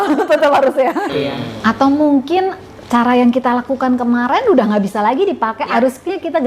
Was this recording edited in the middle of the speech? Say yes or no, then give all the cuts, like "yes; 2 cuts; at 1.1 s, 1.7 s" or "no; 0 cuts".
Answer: yes; 1 cut; at 1.1 s